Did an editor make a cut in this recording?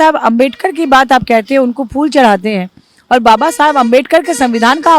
no; 0 cuts

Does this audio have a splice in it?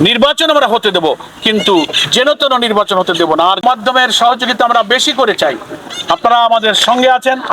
yes; 1 cut; at 3.6 s

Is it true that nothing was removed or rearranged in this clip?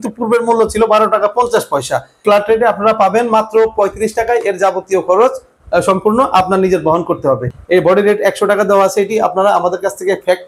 no; 2 cuts; at 2.2 s, 7.5 s

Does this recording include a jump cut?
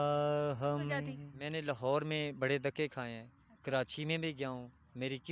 yes; 1 cut; at 1.2 s

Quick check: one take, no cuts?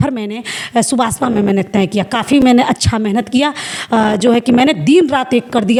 yes; 0 cuts

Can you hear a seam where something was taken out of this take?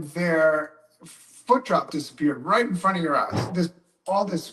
yes; 1 cut; at 3.5 s

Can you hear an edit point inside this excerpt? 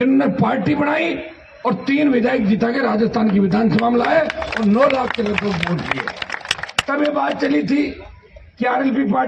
no; 0 cuts

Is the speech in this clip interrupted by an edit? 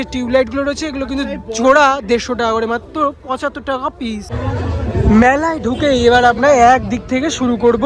no; 0 cuts

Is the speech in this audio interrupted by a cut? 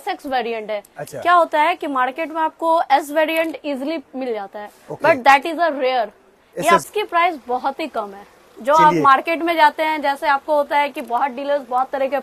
yes; 1 cut; at 6.8 s

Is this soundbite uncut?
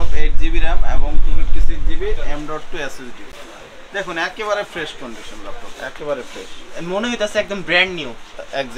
yes; 0 cuts

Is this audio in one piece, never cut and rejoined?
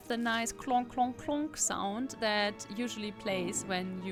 yes; 0 cuts

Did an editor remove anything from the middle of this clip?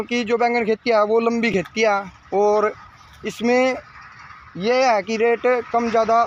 no; 0 cuts

